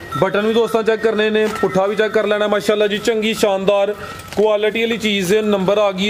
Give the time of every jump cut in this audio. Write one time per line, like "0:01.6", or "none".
none